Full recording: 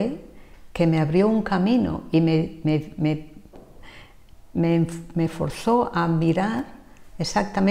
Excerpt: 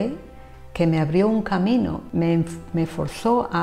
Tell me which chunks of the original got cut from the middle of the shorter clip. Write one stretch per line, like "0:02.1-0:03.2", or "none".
0:02.0-0:04.4

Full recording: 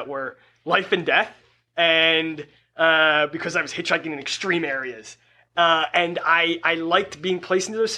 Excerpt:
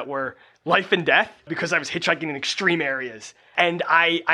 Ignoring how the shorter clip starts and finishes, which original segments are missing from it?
0:01.5-0:03.4
0:05.4-0:05.9

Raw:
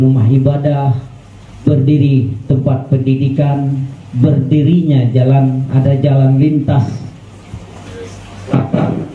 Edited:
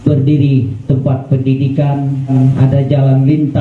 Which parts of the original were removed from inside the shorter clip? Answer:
0:03.9-0:05.4

